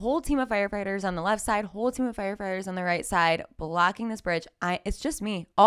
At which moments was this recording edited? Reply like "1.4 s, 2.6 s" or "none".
none